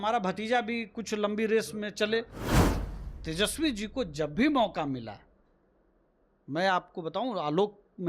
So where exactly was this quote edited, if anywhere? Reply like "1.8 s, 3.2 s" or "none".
2.6 s